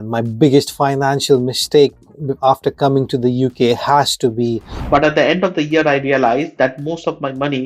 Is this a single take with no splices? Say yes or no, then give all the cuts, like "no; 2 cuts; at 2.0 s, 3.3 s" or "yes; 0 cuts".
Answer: no; 1 cut; at 4.7 s